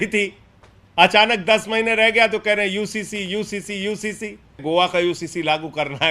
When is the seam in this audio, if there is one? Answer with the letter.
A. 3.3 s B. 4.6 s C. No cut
B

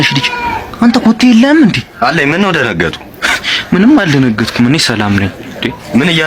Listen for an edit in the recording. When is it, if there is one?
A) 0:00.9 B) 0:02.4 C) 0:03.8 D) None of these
D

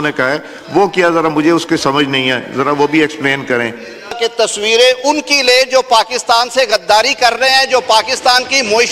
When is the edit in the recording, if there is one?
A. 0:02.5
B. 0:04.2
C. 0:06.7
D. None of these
B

